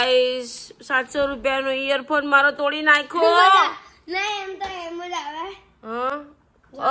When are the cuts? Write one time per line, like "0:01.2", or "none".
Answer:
none